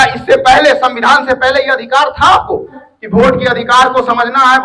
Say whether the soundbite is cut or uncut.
cut